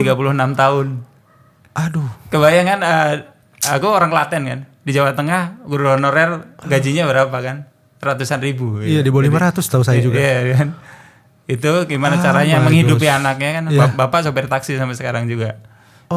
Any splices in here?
no; 0 cuts

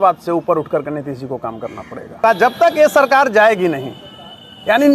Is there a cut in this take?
yes; 1 cut; at 2.2 s

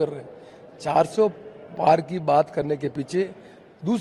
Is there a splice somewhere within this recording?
no; 0 cuts

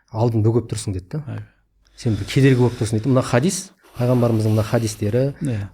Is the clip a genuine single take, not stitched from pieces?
yes; 0 cuts

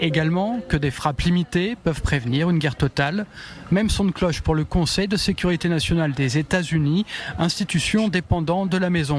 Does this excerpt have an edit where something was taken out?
no; 0 cuts

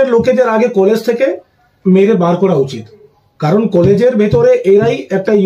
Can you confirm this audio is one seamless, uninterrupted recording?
yes; 0 cuts

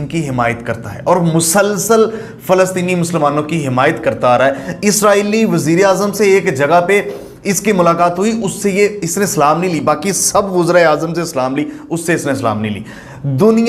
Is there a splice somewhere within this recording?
no; 0 cuts

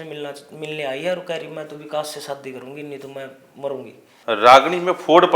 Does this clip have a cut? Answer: yes; 1 cut; at 4.1 s

